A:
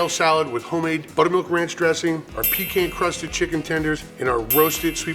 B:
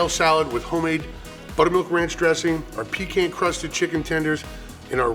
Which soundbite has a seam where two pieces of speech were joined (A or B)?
A